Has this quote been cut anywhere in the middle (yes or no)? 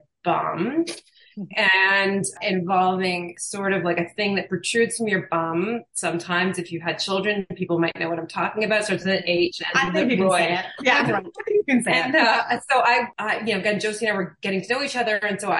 no